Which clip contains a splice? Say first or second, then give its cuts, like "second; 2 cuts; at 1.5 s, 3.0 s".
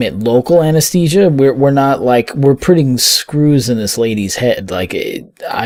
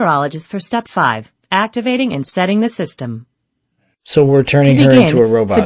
second; 1 cut; at 4.1 s